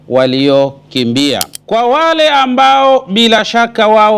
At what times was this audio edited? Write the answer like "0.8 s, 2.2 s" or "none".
1.5 s